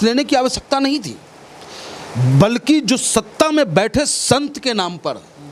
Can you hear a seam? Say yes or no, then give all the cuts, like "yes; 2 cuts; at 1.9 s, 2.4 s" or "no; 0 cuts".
no; 0 cuts